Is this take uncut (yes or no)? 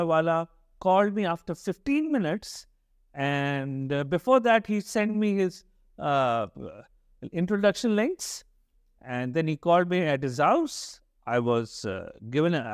yes